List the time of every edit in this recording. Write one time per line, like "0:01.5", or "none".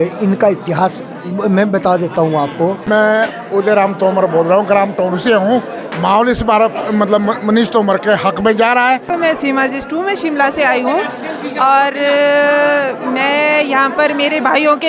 0:02.8
0:09.1